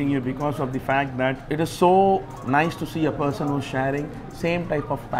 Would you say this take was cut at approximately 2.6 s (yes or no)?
no